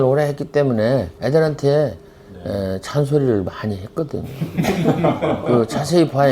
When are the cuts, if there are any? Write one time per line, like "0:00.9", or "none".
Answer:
0:01.1